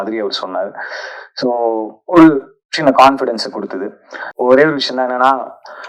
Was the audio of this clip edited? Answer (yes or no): yes